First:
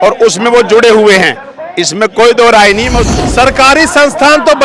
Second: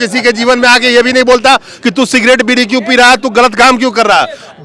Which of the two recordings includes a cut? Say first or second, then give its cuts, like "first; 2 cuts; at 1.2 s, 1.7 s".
first; 1 cut; at 3.0 s